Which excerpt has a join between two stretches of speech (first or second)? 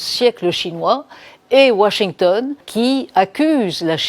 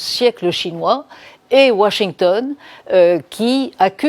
first